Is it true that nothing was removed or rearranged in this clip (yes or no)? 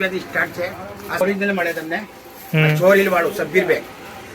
no